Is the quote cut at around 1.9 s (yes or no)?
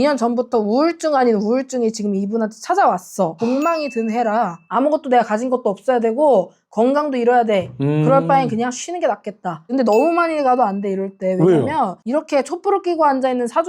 no